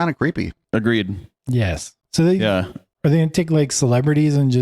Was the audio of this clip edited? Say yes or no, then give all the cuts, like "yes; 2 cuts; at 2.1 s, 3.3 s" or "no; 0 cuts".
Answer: no; 0 cuts